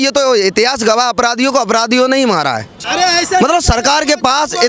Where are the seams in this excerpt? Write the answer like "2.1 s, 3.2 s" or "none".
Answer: 2.8 s